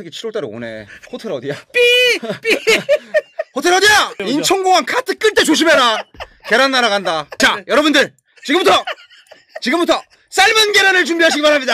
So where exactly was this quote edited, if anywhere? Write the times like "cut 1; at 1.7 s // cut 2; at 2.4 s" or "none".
cut 1; at 0.9 s